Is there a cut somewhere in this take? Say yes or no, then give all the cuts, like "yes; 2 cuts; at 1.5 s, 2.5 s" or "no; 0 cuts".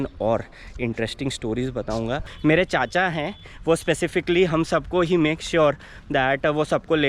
yes; 1 cut; at 2.3 s